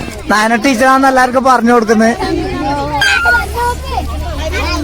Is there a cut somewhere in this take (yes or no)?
yes